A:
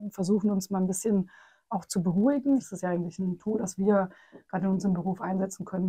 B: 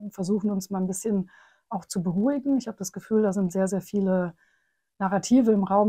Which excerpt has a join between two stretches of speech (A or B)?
A